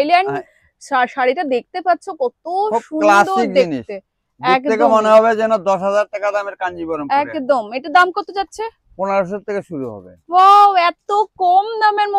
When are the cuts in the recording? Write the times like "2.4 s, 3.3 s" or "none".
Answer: none